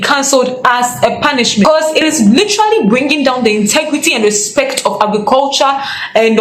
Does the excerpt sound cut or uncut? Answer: cut